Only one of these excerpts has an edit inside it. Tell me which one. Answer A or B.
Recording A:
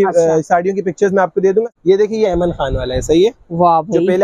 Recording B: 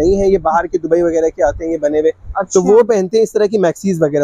A